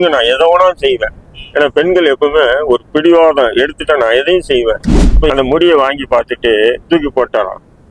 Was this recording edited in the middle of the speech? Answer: yes; 1 cut; at 5.3 s

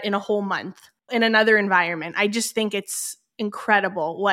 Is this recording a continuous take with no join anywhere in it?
yes; 0 cuts

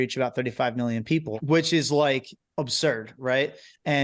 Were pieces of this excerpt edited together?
yes; 1 cut; at 1.3 s

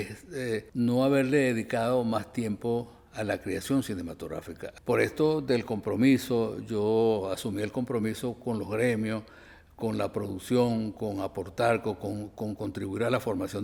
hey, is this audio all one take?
yes; 0 cuts

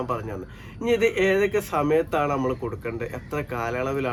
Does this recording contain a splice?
no; 0 cuts

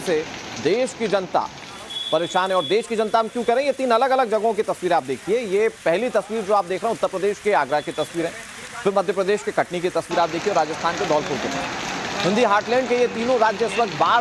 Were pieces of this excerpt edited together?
yes; 1 cut; at 11.8 s

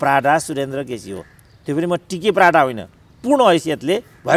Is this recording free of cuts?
yes; 0 cuts

